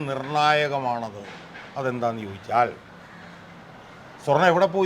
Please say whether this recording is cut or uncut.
uncut